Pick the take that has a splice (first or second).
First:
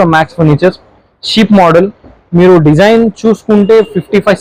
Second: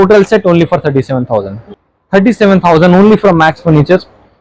second